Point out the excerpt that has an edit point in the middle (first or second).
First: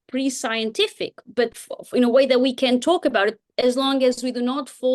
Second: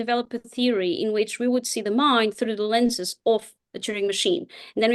first